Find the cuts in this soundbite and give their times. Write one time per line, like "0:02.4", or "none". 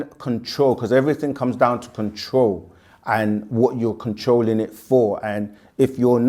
none